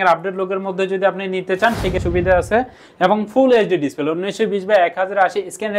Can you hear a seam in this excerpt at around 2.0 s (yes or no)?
yes